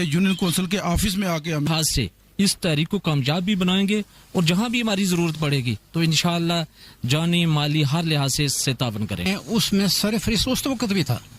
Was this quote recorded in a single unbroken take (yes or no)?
no